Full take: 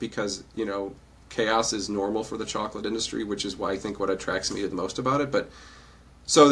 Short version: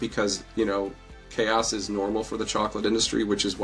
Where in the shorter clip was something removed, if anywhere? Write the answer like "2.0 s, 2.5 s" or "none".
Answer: none